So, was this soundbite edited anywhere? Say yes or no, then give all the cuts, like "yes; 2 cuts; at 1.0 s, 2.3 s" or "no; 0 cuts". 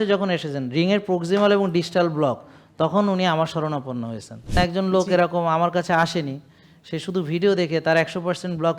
yes; 1 cut; at 4.5 s